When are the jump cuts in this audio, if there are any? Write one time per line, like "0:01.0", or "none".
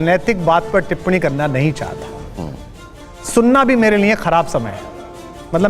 0:03.0